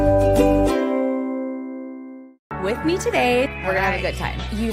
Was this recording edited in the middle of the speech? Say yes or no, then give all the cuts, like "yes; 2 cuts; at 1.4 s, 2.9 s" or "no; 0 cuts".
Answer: no; 0 cuts